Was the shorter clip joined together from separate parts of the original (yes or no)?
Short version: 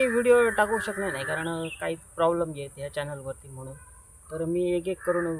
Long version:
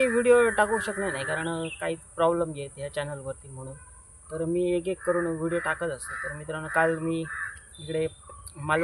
no